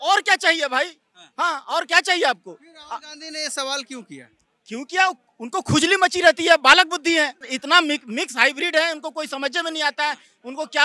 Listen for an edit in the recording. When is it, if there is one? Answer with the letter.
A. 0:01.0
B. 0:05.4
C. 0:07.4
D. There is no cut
D